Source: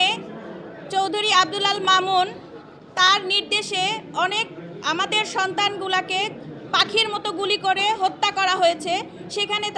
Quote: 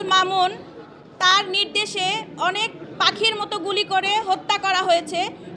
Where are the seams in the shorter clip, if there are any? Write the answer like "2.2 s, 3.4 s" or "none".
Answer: 2.8 s